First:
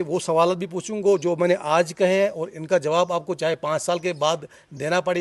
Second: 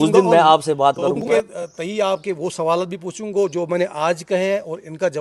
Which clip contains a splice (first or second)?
second